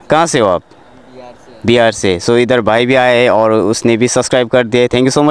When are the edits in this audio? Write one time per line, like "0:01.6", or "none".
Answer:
none